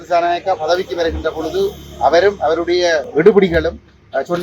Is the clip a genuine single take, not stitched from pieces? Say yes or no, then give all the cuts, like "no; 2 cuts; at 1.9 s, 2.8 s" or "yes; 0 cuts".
no; 1 cut; at 3.1 s